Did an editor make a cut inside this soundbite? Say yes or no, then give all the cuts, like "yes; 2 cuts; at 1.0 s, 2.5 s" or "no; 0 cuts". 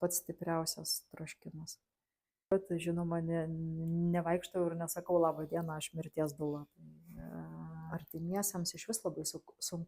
yes; 2 cuts; at 2.5 s, 7.9 s